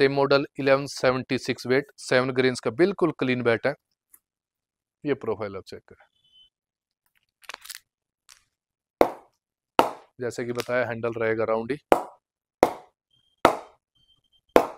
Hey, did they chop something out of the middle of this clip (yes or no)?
no